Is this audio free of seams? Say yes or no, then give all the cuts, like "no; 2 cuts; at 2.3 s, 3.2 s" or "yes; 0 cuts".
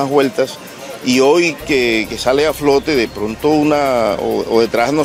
yes; 0 cuts